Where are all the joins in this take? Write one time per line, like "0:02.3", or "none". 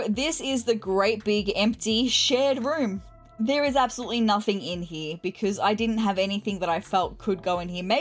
none

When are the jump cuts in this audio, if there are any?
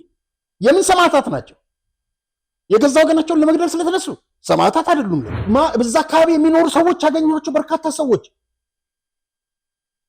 0:05.3

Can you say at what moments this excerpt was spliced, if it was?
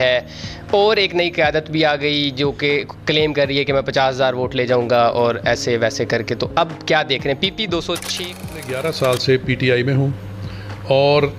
0:08.4

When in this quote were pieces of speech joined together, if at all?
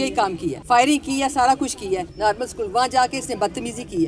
0:02.1

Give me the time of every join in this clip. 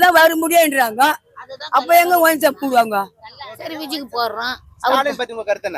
0:03.6

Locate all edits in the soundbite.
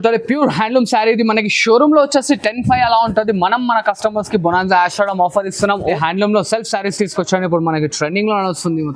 0:05.9

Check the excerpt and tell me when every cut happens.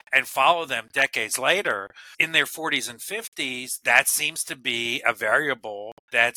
0:02.2

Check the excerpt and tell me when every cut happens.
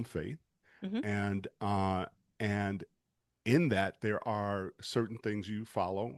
none

